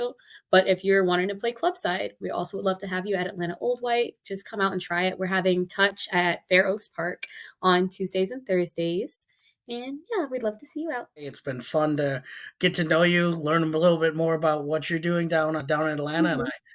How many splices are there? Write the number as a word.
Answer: two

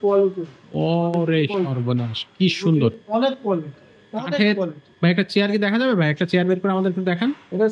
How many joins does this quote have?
zero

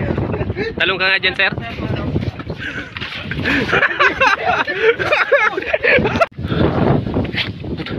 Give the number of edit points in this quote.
one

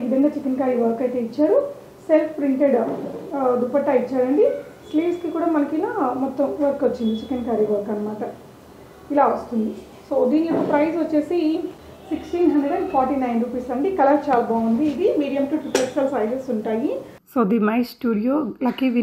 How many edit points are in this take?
zero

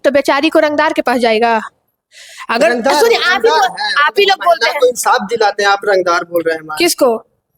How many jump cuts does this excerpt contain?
zero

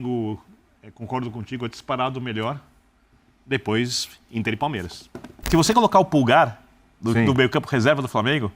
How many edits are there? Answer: one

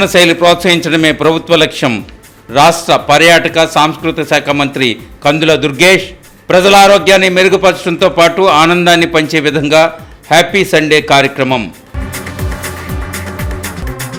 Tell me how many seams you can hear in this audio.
zero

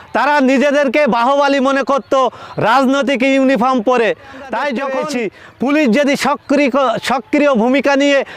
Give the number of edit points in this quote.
one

